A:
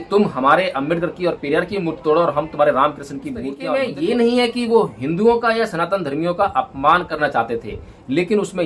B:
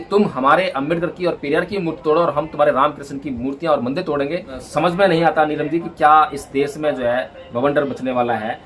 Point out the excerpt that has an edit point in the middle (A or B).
A